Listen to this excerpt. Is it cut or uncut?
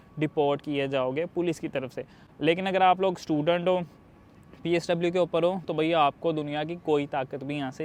uncut